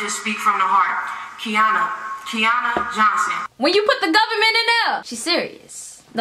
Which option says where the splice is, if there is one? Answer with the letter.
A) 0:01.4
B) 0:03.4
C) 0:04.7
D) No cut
B